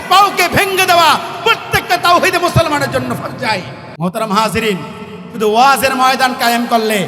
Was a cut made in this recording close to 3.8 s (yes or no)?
yes